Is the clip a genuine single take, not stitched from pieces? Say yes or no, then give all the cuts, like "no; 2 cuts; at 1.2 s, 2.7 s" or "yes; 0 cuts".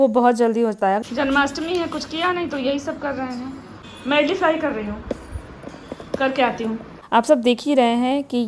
no; 3 cuts; at 1.0 s, 3.7 s, 6.9 s